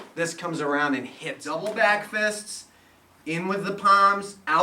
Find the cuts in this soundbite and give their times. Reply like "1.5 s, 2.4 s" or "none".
1.4 s